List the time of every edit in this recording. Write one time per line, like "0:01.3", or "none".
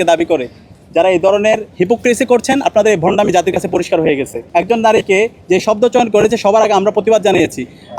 0:04.4